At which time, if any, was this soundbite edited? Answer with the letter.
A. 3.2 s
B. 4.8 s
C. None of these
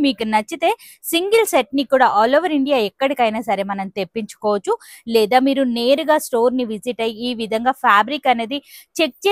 C